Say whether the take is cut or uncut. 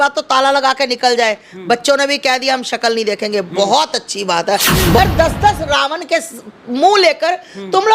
cut